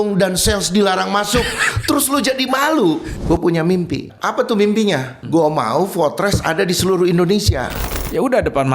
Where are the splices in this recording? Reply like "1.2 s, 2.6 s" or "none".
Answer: 3.1 s, 4.1 s, 5.1 s, 7.8 s